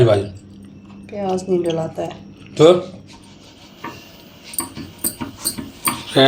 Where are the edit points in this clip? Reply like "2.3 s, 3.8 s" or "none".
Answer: 3.4 s